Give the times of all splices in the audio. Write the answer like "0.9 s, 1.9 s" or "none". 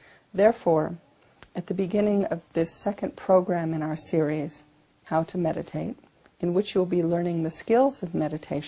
none